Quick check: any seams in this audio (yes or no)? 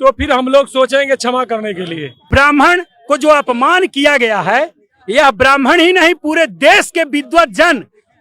yes